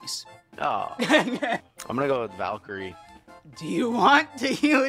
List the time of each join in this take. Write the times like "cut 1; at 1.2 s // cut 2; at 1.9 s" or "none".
cut 1; at 1.7 s